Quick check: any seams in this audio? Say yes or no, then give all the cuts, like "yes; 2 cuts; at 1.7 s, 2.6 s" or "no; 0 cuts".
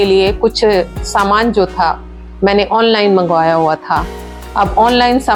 no; 0 cuts